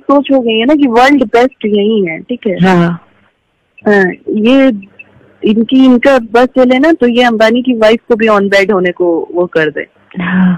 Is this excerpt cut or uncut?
uncut